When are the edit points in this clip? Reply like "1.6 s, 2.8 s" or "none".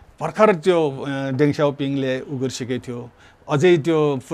none